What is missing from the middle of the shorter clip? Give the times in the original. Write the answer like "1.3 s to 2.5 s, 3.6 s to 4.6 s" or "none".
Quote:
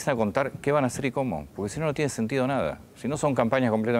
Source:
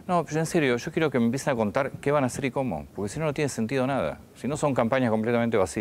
none